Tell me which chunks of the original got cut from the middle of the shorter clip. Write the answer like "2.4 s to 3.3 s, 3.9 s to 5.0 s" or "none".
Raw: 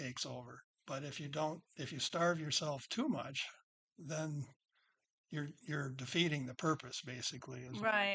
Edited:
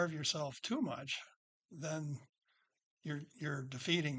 none